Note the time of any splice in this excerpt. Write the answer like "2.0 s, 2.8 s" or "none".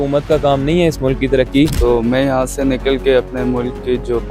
1.8 s